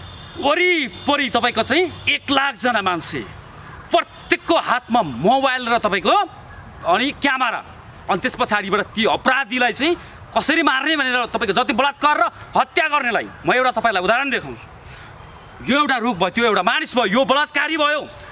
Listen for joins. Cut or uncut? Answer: uncut